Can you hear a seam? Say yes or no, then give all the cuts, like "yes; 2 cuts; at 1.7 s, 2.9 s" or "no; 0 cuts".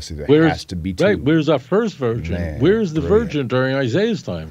no; 0 cuts